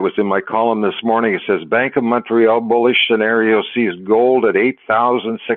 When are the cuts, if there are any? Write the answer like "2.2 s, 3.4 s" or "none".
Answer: none